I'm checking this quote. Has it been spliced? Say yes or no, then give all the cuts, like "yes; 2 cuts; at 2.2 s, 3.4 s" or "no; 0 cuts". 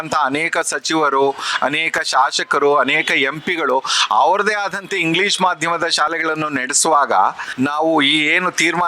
yes; 1 cut; at 7.4 s